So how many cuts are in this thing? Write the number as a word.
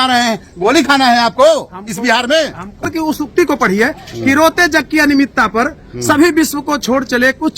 one